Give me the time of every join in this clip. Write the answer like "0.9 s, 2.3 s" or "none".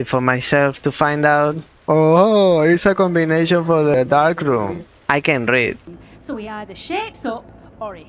5.9 s